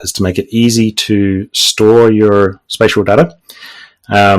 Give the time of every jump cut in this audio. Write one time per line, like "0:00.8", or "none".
none